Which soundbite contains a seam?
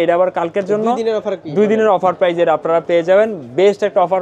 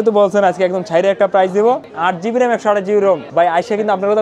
second; 2 cuts; at 1.9 s, 3.3 s

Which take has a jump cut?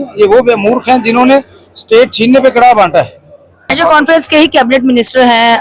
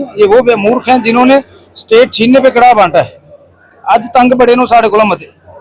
first; 1 cut; at 3.7 s

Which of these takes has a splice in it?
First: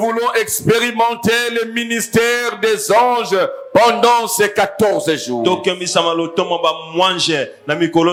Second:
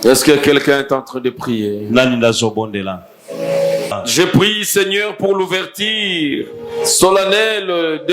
second; 1 cut; at 4.0 s

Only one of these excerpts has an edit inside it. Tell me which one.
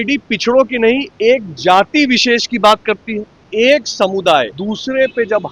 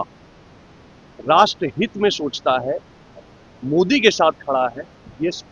first; 2 cuts; at 3.4 s, 4.6 s

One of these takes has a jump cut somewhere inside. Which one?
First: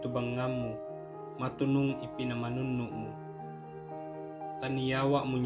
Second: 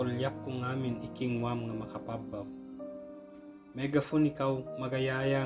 first; 2 cuts; at 2.9 s, 4.6 s

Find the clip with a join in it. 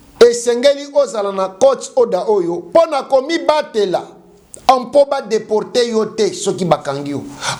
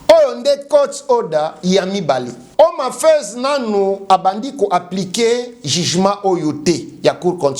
second; 1 cut; at 2.4 s

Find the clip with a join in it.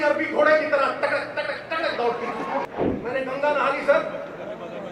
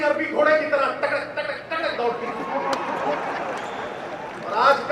first; 1 cut; at 2.6 s

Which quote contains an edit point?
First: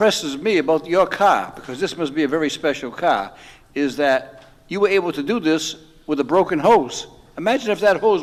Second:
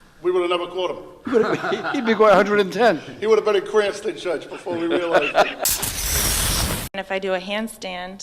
second; 2 cuts; at 5.6 s, 6.9 s

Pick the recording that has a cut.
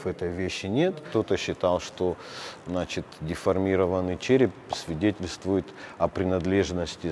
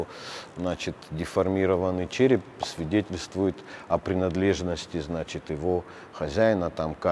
first; 1 cut; at 1.1 s

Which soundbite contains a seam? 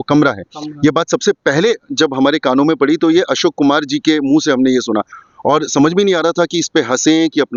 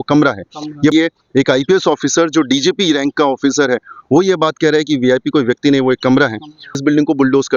second; 2 cuts; at 0.9 s, 6.8 s

